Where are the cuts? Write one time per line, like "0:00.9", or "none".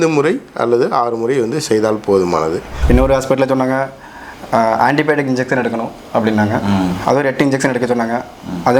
0:02.7